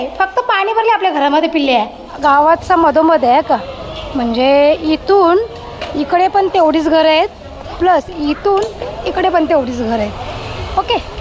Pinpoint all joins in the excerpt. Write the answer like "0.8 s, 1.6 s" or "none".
2.2 s